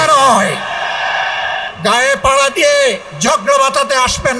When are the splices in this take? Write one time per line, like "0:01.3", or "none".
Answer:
0:01.7
0:03.1

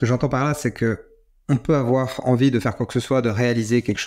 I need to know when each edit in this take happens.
none

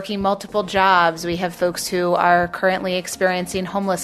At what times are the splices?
0:01.5

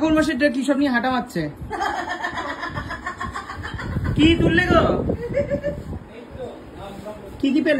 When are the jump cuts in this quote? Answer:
none

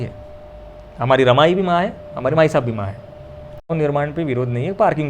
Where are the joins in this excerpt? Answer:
0:03.7

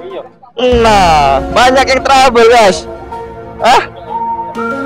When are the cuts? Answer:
0:04.0

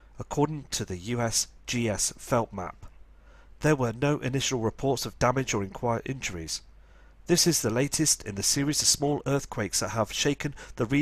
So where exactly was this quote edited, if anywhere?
0:03.7

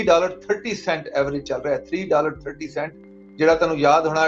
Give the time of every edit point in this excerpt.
none

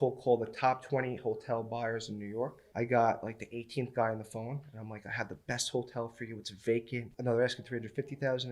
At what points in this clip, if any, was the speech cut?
0:02.6
0:07.2

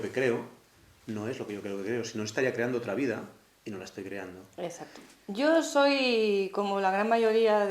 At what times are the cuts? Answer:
0:05.0

